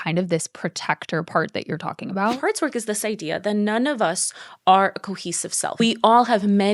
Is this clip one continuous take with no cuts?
no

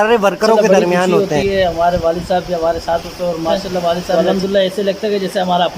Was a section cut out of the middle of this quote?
yes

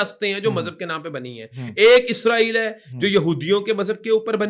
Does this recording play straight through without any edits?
yes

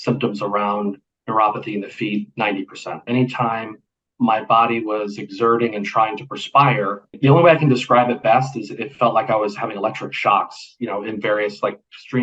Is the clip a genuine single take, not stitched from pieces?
no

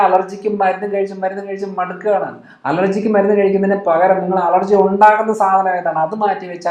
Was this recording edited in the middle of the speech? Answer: no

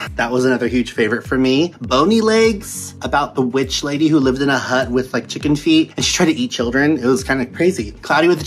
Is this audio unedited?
yes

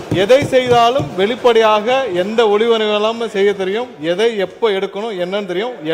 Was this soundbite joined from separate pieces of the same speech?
no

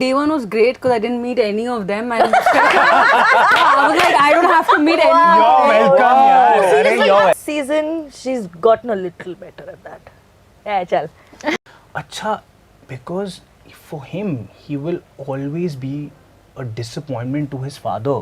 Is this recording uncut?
no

